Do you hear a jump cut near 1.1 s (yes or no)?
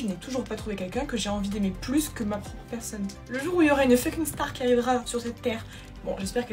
no